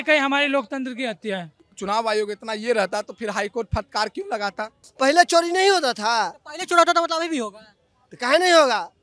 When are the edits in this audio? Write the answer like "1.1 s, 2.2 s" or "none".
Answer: 1.5 s, 4.8 s